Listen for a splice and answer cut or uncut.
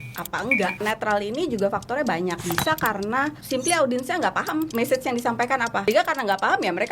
cut